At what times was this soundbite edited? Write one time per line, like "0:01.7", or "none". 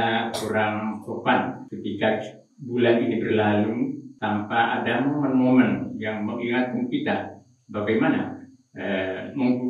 0:01.7
0:04.1